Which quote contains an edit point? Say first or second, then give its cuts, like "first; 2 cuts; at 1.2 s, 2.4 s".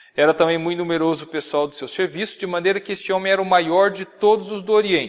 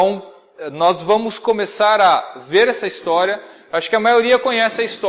first; 1 cut; at 3.2 s